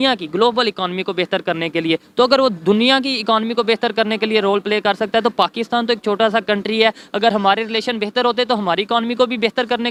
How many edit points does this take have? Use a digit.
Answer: 0